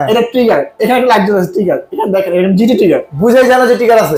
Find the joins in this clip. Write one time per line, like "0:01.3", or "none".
none